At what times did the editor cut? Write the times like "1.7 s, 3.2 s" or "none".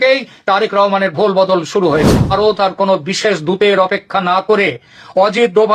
2.2 s